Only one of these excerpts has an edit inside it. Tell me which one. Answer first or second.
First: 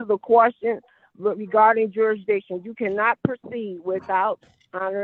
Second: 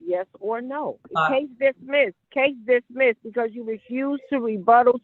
second